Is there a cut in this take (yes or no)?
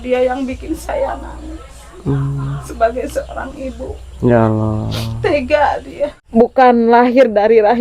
yes